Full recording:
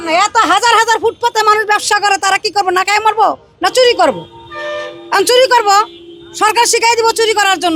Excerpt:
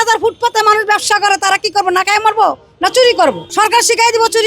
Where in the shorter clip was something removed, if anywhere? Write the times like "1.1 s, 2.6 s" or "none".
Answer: 3.4 s